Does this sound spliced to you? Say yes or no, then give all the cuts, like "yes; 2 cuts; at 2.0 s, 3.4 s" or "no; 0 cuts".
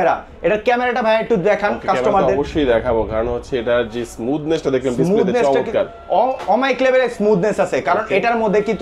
no; 0 cuts